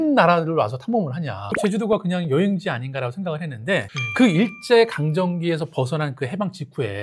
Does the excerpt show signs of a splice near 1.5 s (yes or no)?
yes